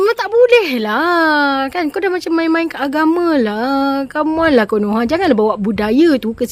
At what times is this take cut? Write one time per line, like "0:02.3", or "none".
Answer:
none